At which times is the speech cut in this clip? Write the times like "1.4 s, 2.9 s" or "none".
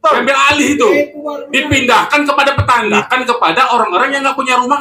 3.0 s